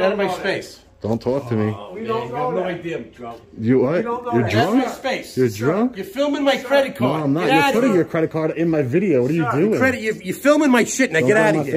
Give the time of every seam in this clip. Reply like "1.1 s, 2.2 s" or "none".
none